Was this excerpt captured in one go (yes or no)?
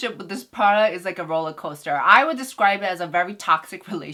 yes